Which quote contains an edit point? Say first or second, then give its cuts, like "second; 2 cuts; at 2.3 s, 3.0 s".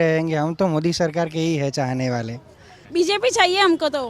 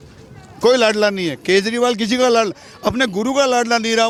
first; 1 cut; at 2.8 s